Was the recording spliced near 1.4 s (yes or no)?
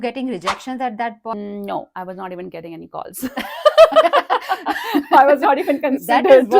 yes